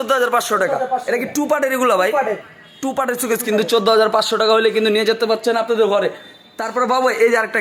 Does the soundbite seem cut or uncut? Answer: uncut